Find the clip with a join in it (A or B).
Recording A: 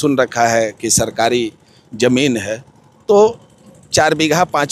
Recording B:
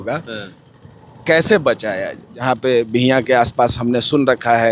B